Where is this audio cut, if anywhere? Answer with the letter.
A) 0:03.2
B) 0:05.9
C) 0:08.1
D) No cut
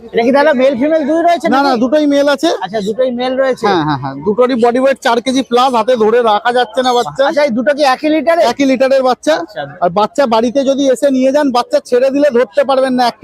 D